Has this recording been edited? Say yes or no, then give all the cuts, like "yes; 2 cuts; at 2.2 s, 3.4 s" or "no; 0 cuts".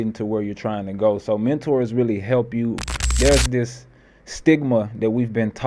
yes; 1 cut; at 3.1 s